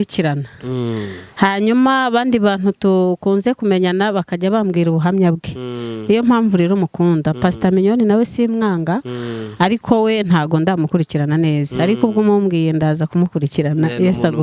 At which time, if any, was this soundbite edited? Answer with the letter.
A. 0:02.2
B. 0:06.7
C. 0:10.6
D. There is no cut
D